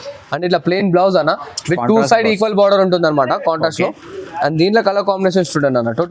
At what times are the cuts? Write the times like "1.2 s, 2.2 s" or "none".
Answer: none